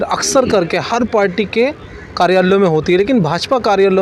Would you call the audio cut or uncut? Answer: uncut